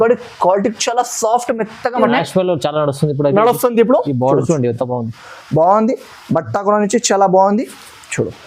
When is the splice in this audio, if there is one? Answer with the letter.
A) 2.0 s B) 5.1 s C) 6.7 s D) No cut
A